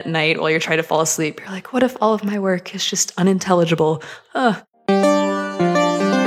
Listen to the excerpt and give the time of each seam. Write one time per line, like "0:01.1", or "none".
0:04.5